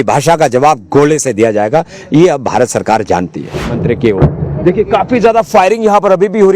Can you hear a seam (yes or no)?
yes